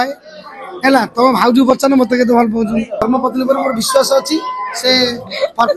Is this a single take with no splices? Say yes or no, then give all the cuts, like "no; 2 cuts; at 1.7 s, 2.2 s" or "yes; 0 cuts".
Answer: no; 1 cut; at 3.0 s